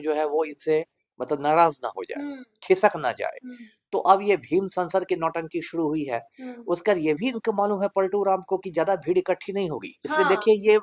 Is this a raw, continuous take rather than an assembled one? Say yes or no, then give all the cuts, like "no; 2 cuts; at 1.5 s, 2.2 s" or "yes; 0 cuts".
yes; 0 cuts